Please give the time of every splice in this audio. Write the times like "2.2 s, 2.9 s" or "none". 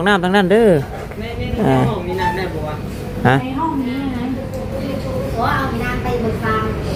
none